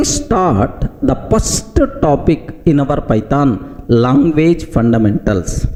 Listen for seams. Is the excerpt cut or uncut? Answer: uncut